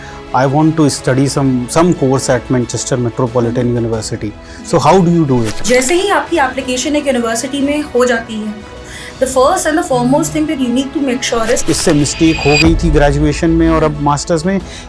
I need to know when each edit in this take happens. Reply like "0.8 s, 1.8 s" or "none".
5.5 s, 11.6 s